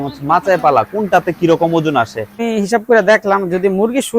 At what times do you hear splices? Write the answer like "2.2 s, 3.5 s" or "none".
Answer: 2.4 s